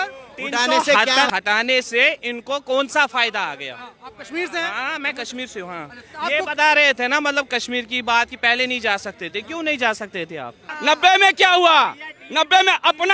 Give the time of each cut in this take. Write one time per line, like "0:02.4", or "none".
0:01.3
0:10.7